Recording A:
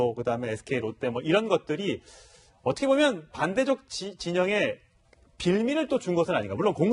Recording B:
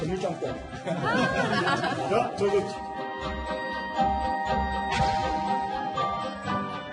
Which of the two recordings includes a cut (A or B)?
B